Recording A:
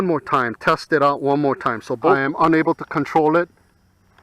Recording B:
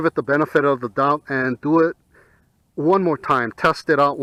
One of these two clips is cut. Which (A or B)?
A